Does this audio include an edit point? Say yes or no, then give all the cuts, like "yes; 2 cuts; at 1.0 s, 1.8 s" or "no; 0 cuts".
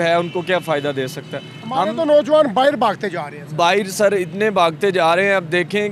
no; 0 cuts